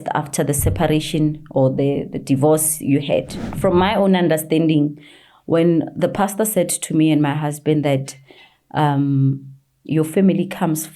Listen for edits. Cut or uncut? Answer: cut